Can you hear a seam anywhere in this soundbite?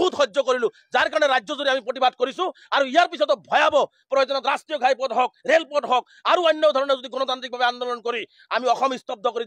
no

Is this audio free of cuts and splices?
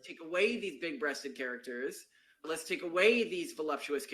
yes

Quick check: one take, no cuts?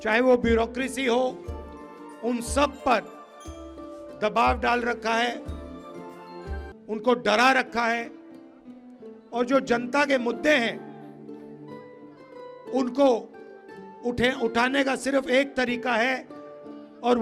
yes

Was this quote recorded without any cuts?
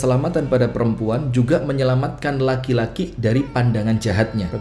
yes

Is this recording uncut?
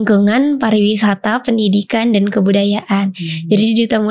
yes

